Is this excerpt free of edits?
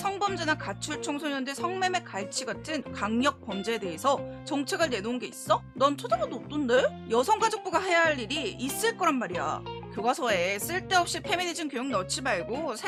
yes; 0 cuts

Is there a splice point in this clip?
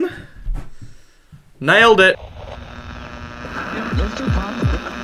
yes; 1 cut; at 3.1 s

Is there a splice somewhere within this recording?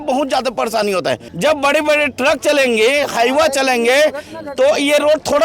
yes; 1 cut; at 1.3 s

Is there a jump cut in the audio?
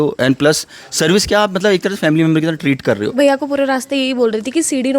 yes; 1 cut; at 3.1 s

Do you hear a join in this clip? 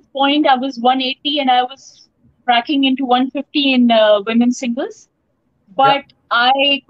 no; 0 cuts

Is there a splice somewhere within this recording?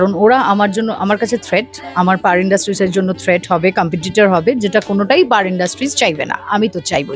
no; 0 cuts

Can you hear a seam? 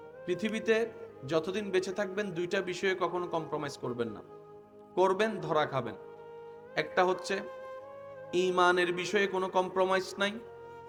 no; 0 cuts

